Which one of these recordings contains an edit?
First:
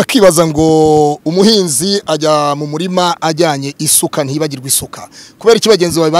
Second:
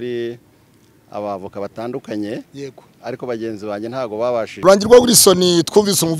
second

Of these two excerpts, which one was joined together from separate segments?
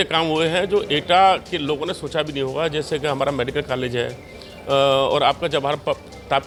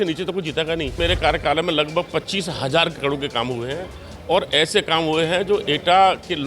second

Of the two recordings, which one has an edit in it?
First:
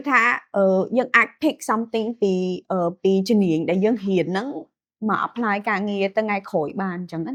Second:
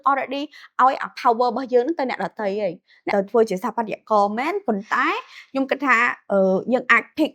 second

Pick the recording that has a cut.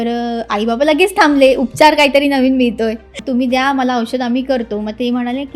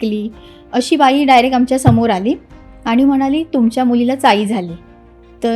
first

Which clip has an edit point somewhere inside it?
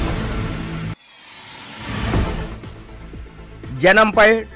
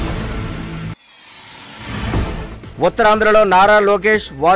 first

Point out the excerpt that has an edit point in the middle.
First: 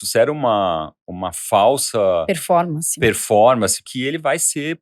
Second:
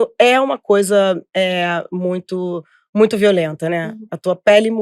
first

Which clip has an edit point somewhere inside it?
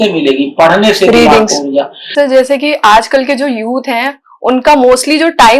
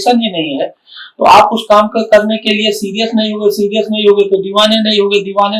first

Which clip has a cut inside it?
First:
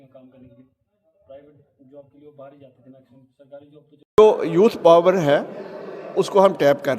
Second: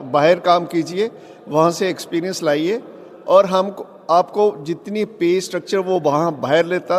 first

